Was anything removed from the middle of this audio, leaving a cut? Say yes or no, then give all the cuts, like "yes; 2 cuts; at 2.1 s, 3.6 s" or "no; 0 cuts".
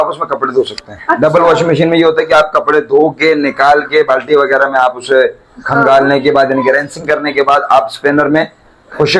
no; 0 cuts